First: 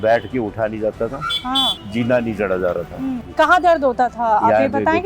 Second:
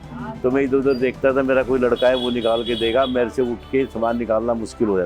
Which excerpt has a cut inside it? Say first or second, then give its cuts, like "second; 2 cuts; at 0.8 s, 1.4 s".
first; 2 cuts; at 1.8 s, 3.2 s